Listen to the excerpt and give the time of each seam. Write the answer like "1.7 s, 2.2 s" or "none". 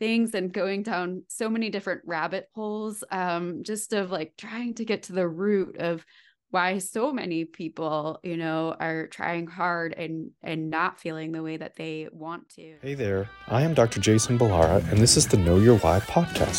13.0 s